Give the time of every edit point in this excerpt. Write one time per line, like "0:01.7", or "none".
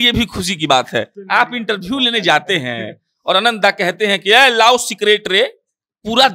0:01.2